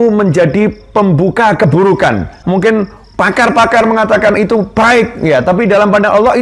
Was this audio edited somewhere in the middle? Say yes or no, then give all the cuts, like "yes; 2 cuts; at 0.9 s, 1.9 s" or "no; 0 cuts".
yes; 1 cut; at 2.4 s